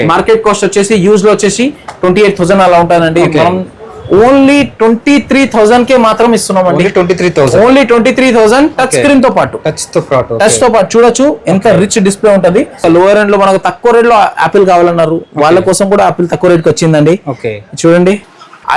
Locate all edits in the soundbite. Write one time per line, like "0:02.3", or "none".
0:12.7